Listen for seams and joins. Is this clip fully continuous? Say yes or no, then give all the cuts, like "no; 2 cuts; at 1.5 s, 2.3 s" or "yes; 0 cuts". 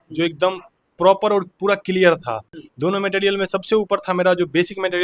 yes; 0 cuts